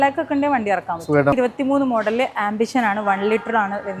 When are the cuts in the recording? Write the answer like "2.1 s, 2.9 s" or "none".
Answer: 1.3 s